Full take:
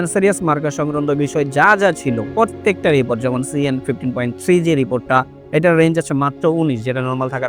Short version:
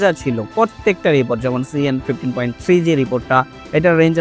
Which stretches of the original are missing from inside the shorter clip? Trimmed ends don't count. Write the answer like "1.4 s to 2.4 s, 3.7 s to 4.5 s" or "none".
none

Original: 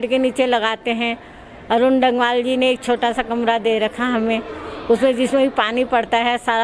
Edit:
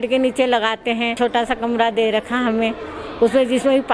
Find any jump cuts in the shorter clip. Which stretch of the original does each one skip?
1.1 s to 2.8 s

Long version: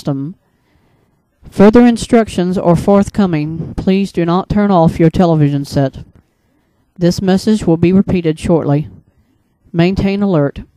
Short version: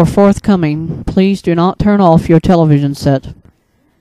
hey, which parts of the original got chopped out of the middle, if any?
none

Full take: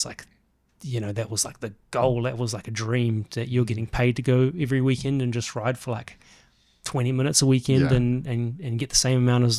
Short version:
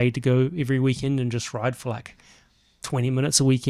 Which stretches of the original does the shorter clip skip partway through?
none

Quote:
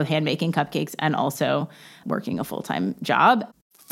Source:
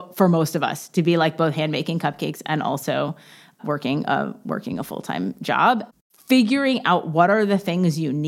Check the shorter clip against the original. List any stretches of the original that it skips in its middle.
3.4 s to 4.4 s

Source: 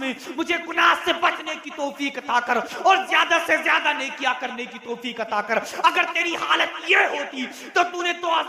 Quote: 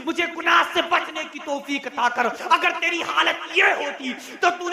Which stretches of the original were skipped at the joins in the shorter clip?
2.7 s to 5.7 s

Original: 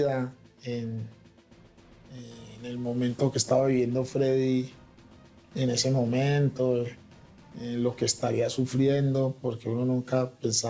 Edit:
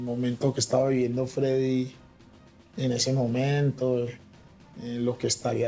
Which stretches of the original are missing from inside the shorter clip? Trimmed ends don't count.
none

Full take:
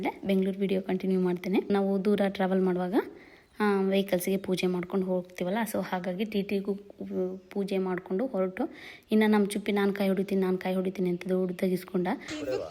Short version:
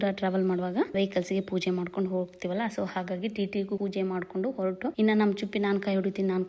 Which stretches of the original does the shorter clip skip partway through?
3.1 s to 3.9 s, 6.8 s to 7.5 s, 8.7 s to 9.1 s

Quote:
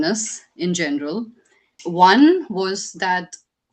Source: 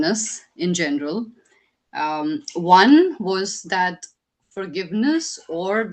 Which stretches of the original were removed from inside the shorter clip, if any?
1.8 s to 2.5 s

